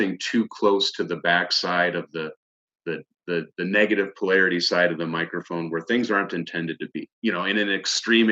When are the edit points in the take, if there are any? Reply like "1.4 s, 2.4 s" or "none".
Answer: 7.1 s